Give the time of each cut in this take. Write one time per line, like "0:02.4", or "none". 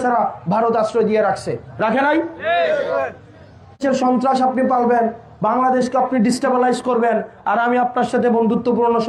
0:03.8